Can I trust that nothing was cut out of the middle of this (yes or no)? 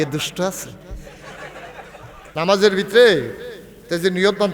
no